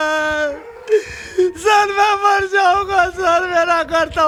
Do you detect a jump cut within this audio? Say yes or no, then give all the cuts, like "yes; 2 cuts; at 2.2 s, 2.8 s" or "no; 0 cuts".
no; 0 cuts